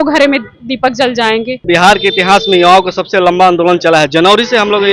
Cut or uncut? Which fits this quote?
cut